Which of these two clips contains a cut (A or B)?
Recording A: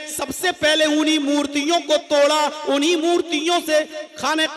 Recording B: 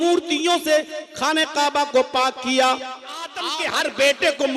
B